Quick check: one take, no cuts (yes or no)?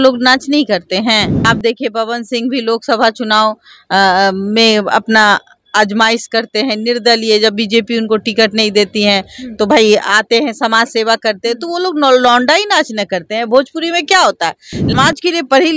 no